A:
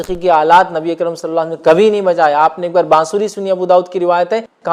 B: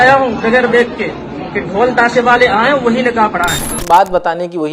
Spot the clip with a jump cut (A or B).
B